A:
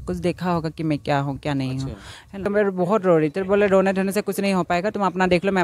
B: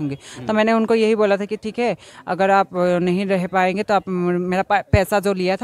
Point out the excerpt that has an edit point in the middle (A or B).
A